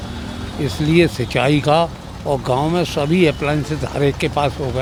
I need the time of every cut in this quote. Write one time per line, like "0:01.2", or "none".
none